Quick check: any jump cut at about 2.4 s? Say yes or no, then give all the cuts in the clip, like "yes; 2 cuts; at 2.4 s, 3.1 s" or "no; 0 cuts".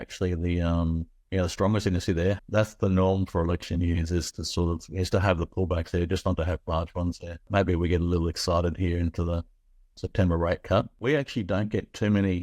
yes; 3 cuts; at 2.4 s, 7.5 s, 11.0 s